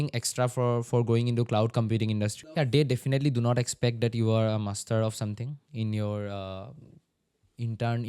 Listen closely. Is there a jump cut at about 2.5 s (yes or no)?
yes